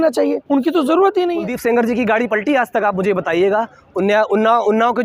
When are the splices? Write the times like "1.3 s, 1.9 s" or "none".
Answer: 1.5 s